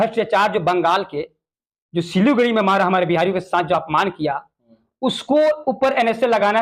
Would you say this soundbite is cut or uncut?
uncut